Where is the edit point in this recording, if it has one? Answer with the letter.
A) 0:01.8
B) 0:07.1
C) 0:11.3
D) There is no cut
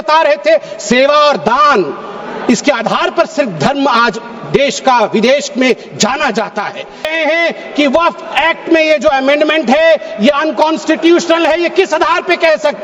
B